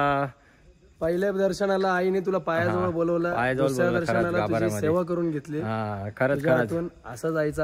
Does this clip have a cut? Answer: no; 0 cuts

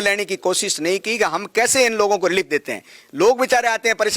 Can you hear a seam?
no; 0 cuts

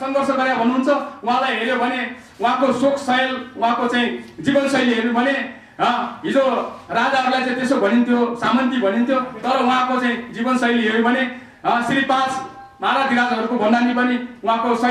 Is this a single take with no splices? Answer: yes; 0 cuts

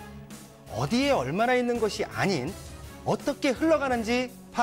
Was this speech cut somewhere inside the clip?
no; 0 cuts

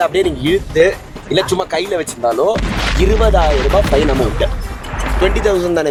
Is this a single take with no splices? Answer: yes; 0 cuts

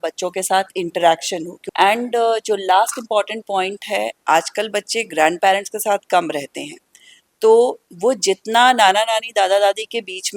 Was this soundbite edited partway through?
yes; 1 cut; at 1.6 s

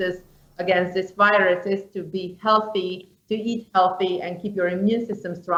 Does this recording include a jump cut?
no; 0 cuts

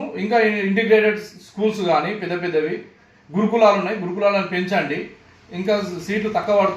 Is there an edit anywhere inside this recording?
no; 0 cuts

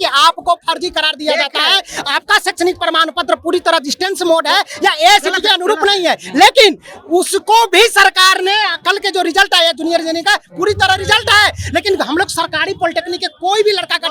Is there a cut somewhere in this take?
no; 0 cuts

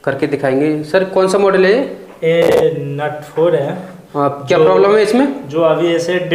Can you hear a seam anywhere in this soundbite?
no; 0 cuts

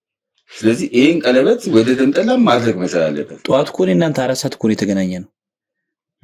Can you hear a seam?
yes; 1 cut; at 3.3 s

